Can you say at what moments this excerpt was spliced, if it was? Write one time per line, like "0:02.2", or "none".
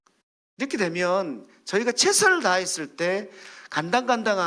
none